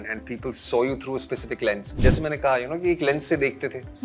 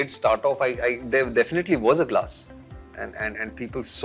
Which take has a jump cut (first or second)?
first